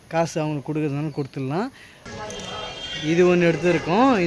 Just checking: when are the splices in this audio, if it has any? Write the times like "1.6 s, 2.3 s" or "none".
2.0 s